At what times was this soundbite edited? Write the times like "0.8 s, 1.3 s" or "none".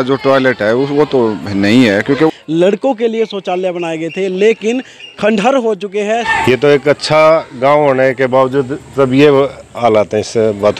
2.3 s, 6.3 s